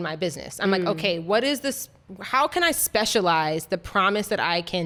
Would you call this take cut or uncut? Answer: uncut